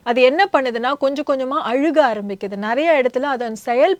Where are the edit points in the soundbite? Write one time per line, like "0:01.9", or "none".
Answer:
none